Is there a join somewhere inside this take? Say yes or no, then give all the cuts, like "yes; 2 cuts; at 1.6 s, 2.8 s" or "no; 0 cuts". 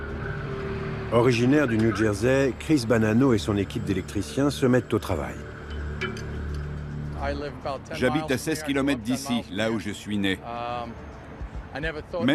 no; 0 cuts